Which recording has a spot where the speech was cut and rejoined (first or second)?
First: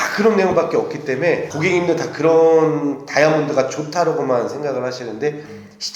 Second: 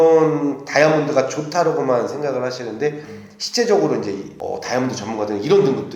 first